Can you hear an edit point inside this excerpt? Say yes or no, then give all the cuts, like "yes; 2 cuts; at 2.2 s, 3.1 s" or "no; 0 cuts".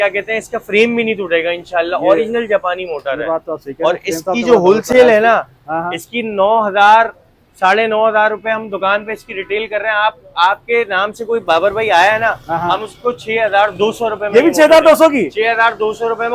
no; 0 cuts